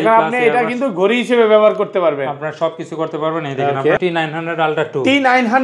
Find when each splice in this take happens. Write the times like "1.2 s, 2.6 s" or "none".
4.0 s